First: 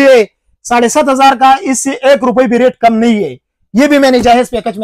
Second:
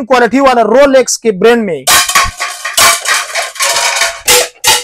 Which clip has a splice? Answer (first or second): second